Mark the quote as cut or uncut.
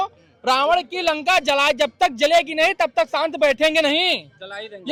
uncut